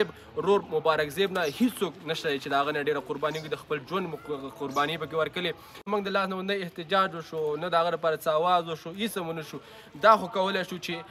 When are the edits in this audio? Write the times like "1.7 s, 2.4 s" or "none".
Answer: 5.8 s